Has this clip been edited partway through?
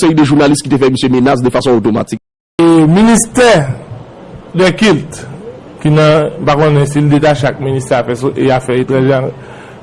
yes; 1 cut; at 2.5 s

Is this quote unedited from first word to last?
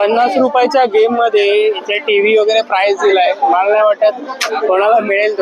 yes; 0 cuts

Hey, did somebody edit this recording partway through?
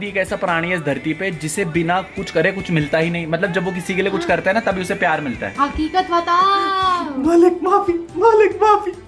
yes; 1 cut; at 5.5 s

